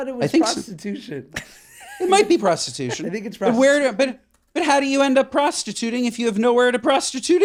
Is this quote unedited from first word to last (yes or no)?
yes